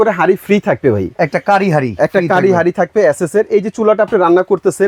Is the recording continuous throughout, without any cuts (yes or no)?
yes